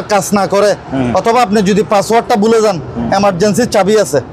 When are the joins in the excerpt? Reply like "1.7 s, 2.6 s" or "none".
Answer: none